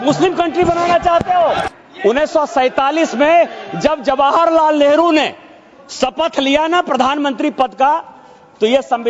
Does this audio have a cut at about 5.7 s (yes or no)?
no